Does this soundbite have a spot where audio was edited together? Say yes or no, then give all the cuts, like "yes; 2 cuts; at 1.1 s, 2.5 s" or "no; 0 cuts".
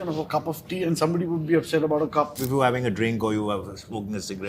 yes; 1 cut; at 2.4 s